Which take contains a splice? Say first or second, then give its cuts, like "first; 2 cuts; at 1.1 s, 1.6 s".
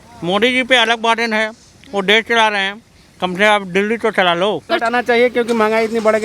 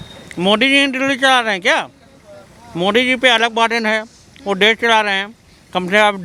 first; 1 cut; at 4.7 s